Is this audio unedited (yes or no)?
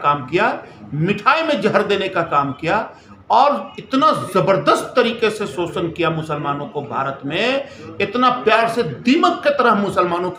yes